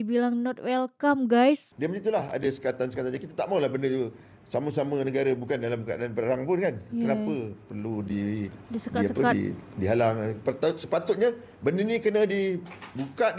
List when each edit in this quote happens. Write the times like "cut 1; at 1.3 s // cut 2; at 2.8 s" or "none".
cut 1; at 1.7 s